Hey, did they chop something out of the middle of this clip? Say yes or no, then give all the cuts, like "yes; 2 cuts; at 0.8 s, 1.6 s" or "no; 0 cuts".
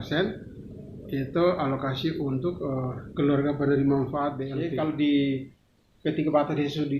yes; 1 cut; at 4.5 s